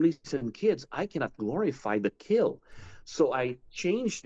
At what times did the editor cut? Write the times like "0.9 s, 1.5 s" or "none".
none